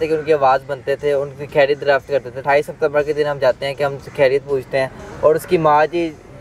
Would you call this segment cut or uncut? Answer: cut